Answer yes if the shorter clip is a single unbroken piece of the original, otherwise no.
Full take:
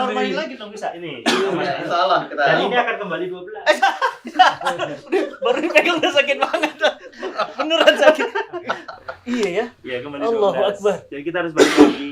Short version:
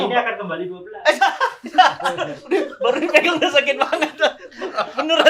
yes